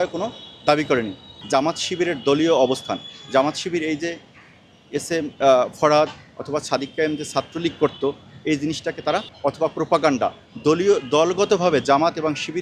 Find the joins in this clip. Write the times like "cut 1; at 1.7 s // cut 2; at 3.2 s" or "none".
cut 1; at 1.3 s // cut 2; at 9.3 s